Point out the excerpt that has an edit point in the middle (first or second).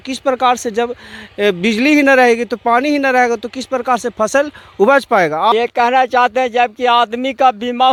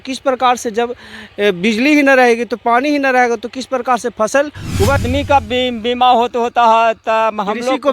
second